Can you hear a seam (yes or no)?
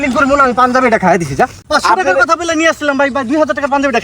yes